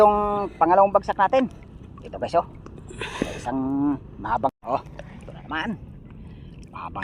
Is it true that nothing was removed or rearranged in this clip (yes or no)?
no